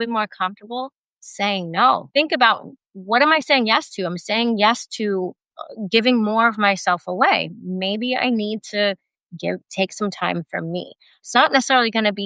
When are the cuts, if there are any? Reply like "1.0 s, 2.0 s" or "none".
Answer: 2.1 s, 11.2 s